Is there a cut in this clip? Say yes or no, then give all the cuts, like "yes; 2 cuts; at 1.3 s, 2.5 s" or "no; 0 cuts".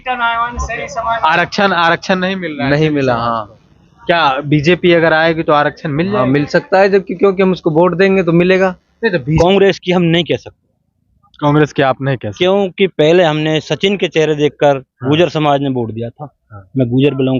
yes; 1 cut; at 9.3 s